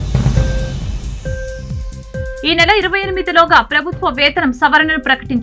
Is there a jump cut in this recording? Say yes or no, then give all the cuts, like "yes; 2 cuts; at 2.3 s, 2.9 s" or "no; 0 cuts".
yes; 1 cut; at 1.0 s